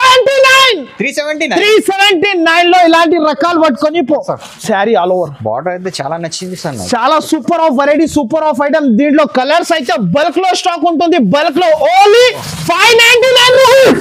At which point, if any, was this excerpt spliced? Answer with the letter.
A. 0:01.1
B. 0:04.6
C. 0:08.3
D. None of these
B